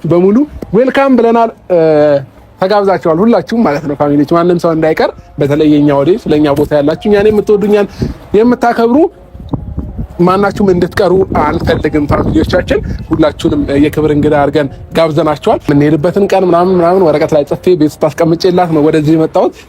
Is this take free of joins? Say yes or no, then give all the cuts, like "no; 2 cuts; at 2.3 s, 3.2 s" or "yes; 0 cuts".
no; 1 cut; at 15.6 s